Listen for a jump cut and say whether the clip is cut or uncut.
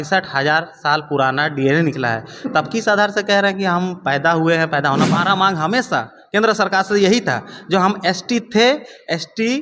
cut